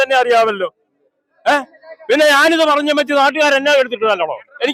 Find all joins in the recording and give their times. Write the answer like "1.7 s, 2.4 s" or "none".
none